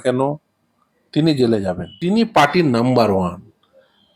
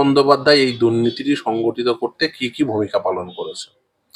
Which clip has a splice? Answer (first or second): first